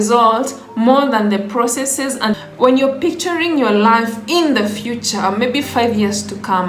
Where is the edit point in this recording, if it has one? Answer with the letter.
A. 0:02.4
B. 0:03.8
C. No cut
A